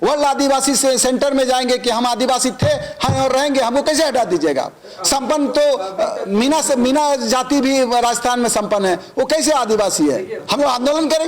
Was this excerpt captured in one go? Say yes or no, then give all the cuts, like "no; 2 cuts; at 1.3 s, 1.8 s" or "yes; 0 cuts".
no; 1 cut; at 10.4 s